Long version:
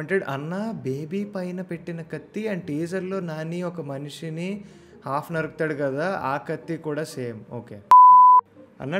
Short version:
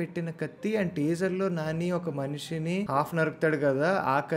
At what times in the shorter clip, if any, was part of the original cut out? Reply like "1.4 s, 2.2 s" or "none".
2.9 s